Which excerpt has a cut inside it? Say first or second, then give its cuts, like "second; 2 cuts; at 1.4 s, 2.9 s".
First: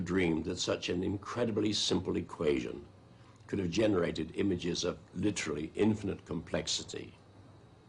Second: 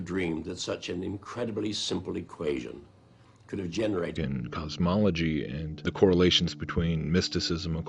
first; 1 cut; at 4.1 s